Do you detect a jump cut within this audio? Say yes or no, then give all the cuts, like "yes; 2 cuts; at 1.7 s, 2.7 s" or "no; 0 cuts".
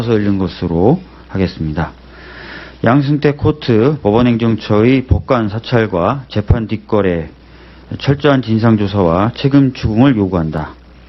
yes; 1 cut; at 1.6 s